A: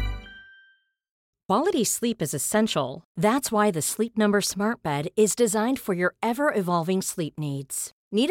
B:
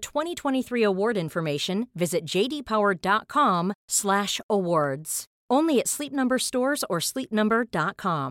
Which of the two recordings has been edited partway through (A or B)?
A